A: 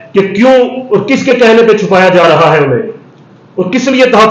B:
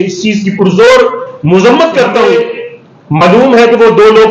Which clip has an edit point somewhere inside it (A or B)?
B